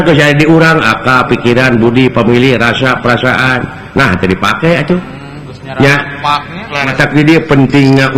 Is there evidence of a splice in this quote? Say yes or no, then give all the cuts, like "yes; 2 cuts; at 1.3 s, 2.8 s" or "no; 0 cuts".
yes; 1 cut; at 6.9 s